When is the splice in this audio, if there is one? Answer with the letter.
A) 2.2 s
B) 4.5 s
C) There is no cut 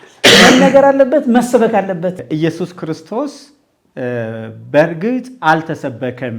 A